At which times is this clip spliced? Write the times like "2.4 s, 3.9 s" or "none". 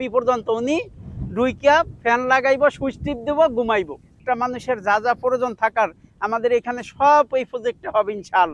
4.2 s